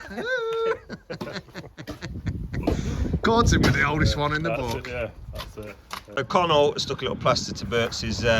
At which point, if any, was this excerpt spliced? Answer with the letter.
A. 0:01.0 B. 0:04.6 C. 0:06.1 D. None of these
C